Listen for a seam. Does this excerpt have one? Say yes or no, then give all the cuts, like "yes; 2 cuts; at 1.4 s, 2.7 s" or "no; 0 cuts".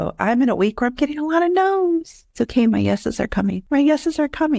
yes; 2 cuts; at 2.2 s, 3.6 s